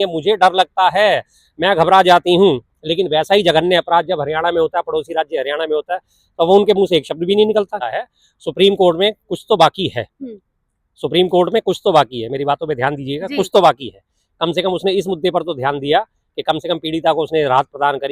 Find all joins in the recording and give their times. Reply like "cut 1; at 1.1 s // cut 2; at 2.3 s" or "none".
cut 1; at 7.8 s